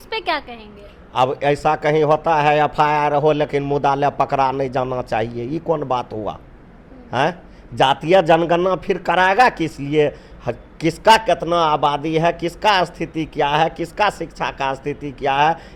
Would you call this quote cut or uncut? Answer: uncut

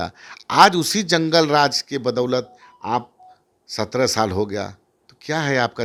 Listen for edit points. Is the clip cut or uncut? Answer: uncut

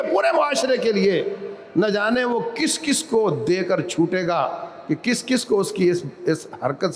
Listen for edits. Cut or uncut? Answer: uncut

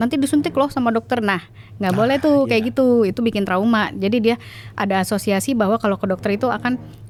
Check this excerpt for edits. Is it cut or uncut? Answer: uncut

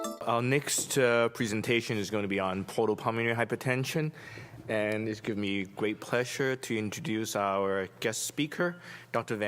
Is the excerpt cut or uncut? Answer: cut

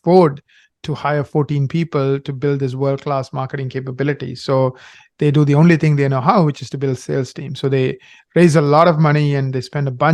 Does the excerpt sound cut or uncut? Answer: uncut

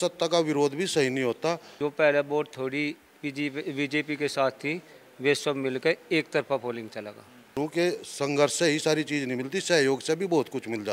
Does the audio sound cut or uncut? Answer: cut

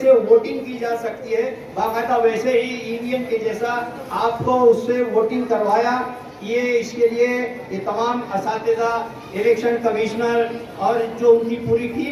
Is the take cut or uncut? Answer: uncut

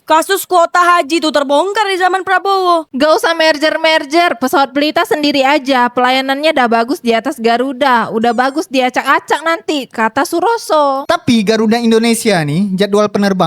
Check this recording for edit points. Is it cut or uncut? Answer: cut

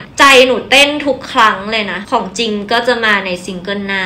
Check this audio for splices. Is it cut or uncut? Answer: cut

